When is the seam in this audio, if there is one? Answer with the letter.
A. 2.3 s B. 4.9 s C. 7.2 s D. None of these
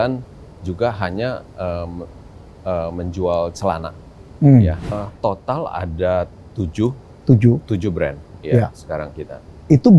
B